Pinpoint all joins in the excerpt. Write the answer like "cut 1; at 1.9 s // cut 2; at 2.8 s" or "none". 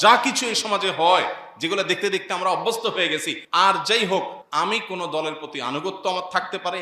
cut 1; at 3.4 s // cut 2; at 4.4 s